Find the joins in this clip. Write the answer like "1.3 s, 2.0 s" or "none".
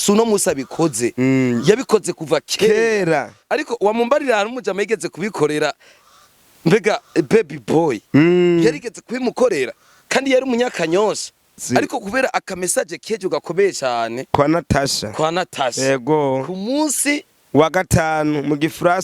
11.6 s

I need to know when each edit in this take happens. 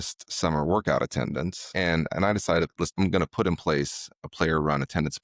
1.7 s, 2.9 s

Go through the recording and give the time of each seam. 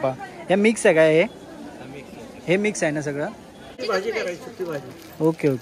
3.7 s

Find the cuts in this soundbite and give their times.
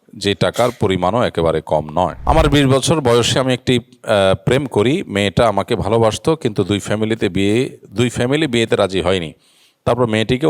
2.2 s

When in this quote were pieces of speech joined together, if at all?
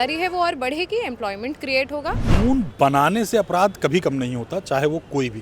2.3 s

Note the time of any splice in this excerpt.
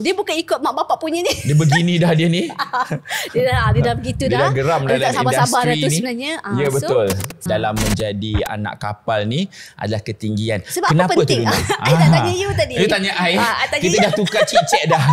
7.4 s

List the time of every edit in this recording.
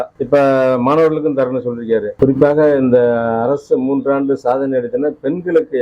2.1 s

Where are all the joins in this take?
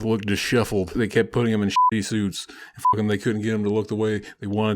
0.9 s

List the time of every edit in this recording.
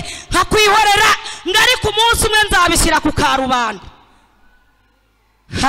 none

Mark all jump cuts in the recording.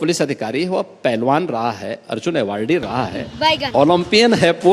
none

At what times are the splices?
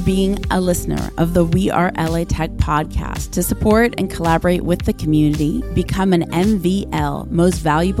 none

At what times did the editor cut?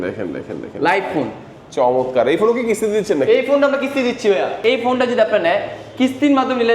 4.6 s

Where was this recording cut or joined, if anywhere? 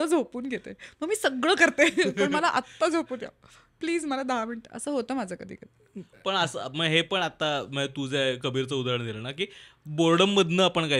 none

